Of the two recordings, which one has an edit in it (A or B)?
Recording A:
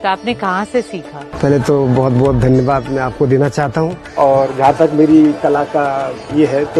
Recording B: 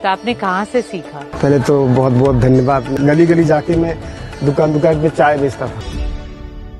B